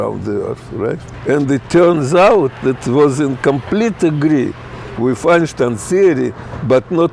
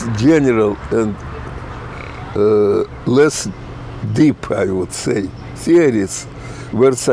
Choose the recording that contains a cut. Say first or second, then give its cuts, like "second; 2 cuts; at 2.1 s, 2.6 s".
first; 1 cut; at 1.1 s